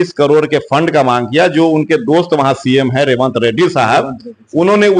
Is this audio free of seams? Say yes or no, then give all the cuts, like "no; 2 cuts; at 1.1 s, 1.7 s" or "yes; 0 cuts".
yes; 0 cuts